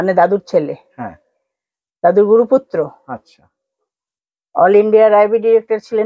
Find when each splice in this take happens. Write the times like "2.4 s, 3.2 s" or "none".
none